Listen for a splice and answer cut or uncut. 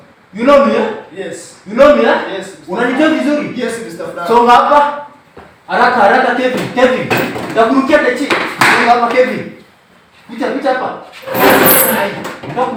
uncut